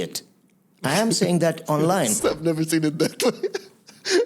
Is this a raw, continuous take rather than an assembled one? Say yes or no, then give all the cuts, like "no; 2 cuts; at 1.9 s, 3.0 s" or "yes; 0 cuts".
no; 1 cut; at 2.2 s